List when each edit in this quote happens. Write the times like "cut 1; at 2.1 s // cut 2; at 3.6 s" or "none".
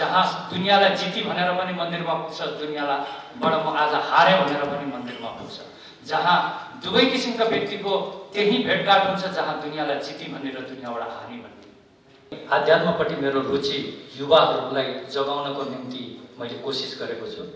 cut 1; at 12.3 s